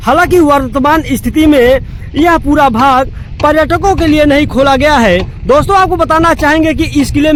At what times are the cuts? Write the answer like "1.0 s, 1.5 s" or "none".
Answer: none

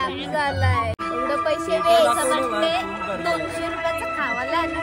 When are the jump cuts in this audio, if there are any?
1.0 s

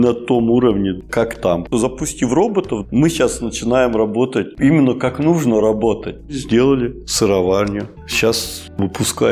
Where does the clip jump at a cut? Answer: 1.6 s, 6.2 s, 7.9 s

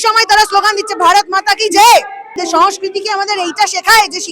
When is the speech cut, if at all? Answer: 2.3 s

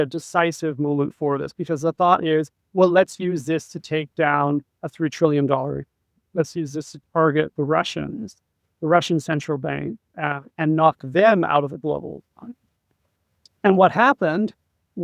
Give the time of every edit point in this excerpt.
none

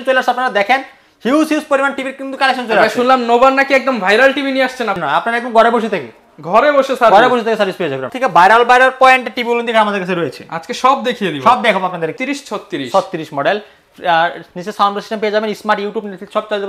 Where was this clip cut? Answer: 5.0 s, 8.1 s, 12.2 s

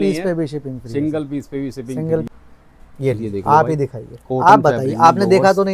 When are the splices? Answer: 2.3 s

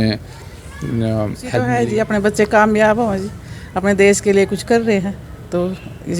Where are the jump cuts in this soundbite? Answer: 1.6 s

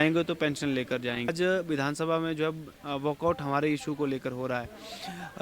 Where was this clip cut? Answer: 1.3 s

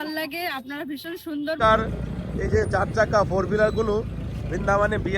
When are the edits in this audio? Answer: 1.6 s

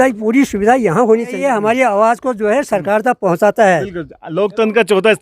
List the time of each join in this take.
1.4 s

